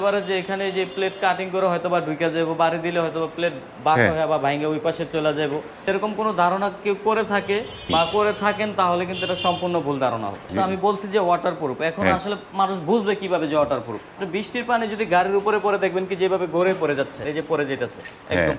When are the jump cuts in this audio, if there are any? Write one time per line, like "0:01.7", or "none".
0:05.9
0:07.9
0:10.5
0:14.2
0:17.2